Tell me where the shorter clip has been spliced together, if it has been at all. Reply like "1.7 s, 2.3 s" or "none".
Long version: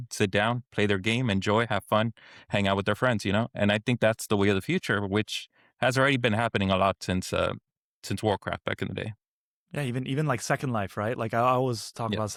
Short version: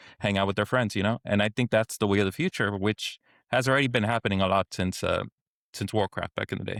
none